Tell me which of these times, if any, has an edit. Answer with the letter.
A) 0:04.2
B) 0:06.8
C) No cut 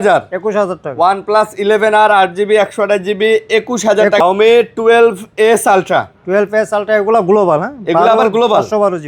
A